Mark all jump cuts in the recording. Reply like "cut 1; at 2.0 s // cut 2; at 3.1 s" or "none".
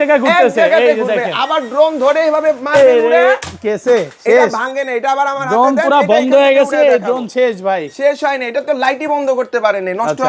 none